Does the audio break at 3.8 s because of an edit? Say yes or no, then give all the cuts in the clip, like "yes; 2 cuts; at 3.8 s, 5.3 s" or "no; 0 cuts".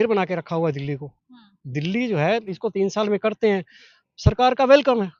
no; 1 cut; at 2.5 s